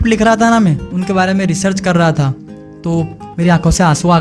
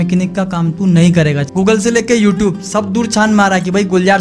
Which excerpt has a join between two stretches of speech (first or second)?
second